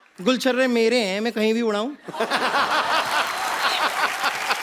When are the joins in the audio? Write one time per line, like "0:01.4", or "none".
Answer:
none